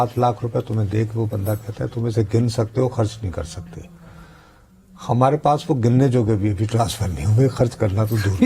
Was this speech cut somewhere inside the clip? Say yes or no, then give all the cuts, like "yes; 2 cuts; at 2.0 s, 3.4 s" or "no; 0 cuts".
no; 0 cuts